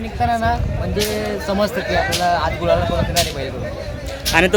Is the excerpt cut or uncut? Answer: uncut